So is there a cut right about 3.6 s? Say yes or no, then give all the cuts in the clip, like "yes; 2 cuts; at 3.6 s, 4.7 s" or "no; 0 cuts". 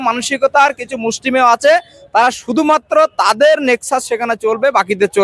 no; 0 cuts